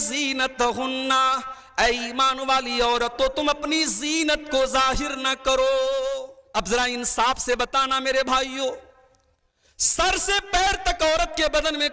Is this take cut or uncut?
cut